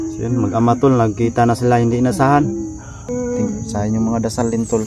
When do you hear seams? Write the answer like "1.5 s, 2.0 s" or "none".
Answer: 3.1 s